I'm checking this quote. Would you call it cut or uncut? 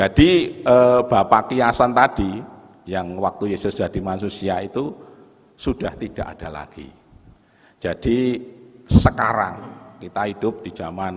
uncut